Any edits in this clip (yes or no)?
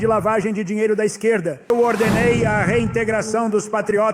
yes